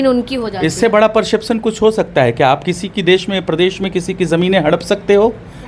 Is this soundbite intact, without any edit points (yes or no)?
yes